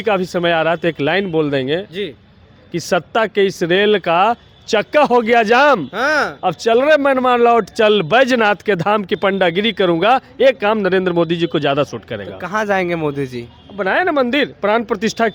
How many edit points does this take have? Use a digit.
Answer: 0